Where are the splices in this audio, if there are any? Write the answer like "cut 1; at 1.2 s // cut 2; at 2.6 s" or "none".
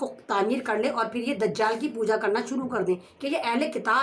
cut 1; at 3.1 s